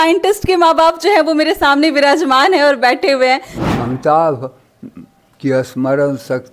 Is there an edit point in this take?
yes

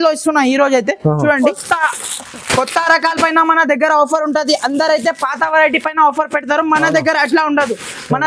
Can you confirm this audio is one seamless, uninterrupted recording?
no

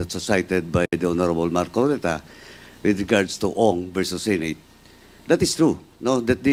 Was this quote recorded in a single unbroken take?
yes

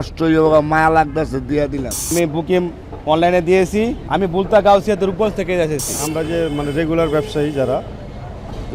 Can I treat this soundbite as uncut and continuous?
no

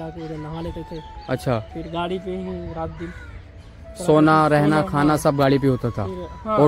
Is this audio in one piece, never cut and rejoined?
yes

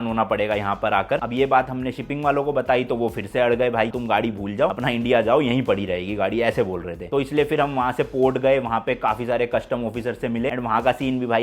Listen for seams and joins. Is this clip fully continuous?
no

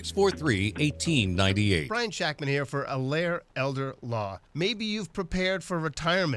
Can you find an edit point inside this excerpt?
no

